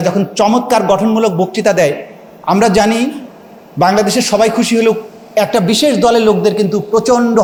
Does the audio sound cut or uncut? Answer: uncut